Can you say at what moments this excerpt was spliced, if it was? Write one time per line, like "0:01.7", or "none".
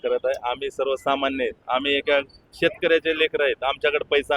none